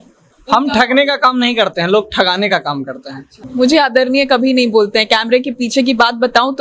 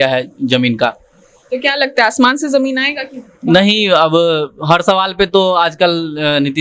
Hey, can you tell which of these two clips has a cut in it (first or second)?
first